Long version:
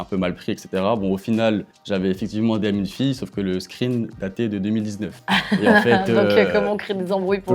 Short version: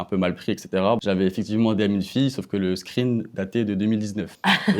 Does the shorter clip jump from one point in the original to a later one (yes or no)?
yes